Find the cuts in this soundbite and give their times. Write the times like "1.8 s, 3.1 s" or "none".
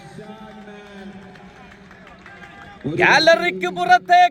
none

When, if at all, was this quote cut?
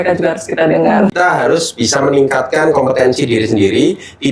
1.1 s

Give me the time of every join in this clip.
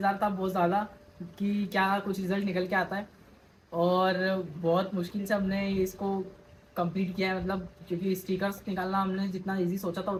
none

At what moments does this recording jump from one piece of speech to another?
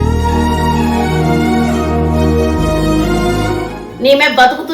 3.8 s

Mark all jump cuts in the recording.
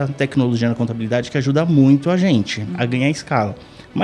none

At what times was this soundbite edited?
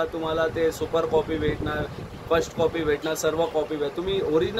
none

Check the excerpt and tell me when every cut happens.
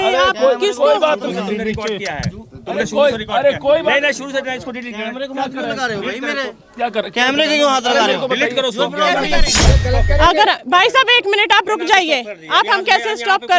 9.6 s

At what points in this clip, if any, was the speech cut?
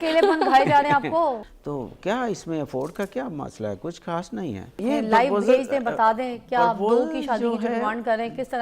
1.4 s, 4.8 s

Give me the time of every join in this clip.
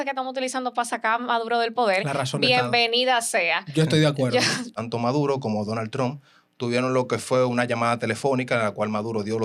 4.7 s

